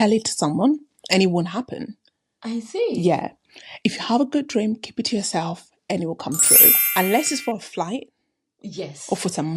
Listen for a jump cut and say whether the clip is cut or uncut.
cut